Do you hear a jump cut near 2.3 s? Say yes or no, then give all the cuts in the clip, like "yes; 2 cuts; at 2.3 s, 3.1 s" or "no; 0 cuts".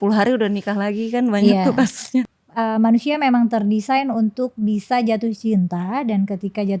yes; 1 cut; at 2.3 s